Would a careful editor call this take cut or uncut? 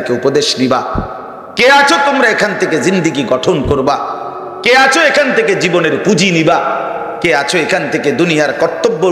uncut